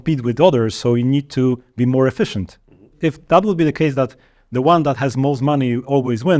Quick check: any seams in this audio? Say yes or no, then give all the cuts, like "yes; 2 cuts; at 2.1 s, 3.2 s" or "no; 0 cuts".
yes; 1 cut; at 2.9 s